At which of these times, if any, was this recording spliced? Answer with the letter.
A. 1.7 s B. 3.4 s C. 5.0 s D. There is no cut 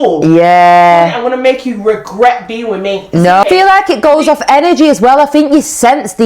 B